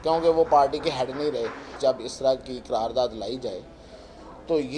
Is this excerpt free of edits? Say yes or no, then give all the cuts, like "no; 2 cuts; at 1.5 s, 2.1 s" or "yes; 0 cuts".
no; 1 cut; at 1.7 s